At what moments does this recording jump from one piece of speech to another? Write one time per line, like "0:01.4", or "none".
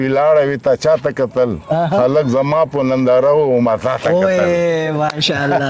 none

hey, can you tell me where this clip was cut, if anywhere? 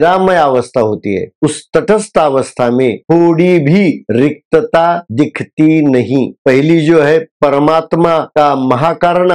0:06.4

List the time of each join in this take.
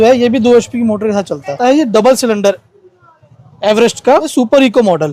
0:01.6
0:04.3

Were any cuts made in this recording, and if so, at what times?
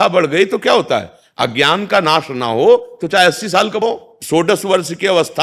0:04.2

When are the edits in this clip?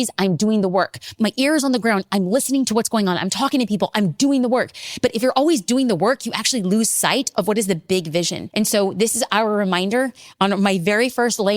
0:08.4

